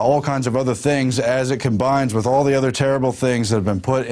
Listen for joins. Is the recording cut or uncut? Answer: cut